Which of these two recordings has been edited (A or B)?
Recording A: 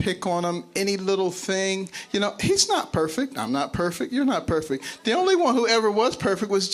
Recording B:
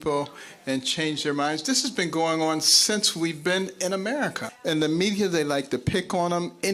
B